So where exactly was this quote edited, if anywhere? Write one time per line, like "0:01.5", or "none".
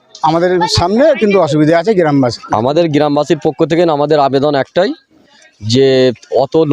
0:02.4